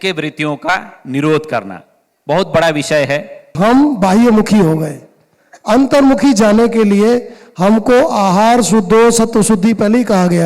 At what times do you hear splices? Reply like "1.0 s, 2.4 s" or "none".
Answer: 3.5 s